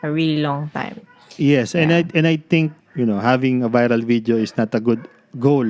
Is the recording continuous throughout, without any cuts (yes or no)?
no